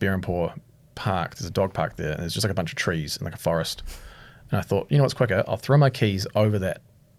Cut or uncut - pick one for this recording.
uncut